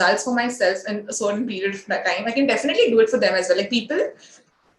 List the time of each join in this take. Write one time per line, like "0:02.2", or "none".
none